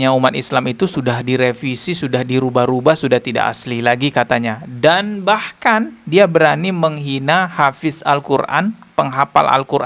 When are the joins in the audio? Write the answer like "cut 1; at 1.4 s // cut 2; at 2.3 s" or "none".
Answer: none